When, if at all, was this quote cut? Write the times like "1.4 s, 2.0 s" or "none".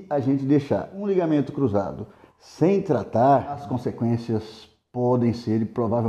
0.9 s